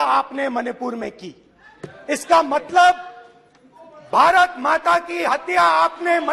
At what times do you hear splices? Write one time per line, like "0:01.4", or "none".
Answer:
none

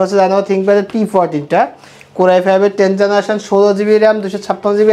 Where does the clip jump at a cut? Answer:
none

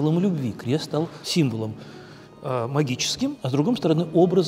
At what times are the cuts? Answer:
0:01.2
0:03.4

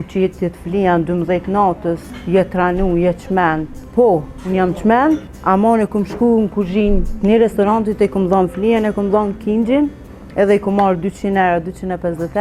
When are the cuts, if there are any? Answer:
0:02.1
0:03.8
0:05.3

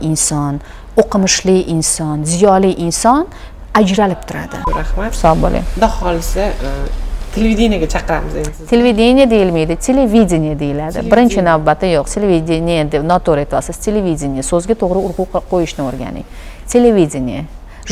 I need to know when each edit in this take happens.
0:04.6

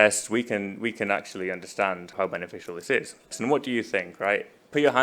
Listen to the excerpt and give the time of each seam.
0:02.1
0:03.3

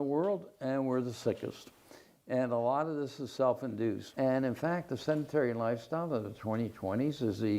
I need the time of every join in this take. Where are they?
0:04.1

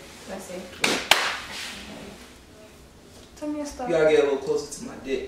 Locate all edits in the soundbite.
none

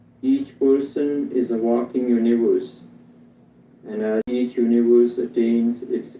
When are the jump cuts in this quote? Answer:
0:04.3

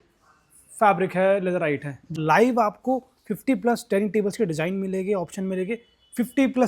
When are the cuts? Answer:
0:02.2

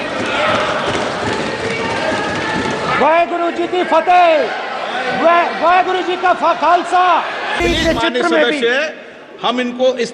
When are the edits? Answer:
0:07.5

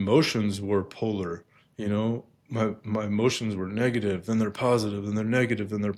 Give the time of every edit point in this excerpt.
none

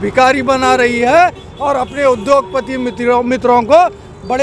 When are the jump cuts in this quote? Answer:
none

